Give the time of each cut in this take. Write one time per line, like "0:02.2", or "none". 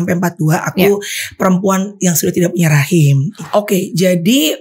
0:03.3